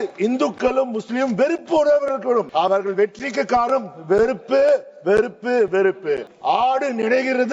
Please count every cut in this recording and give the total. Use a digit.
2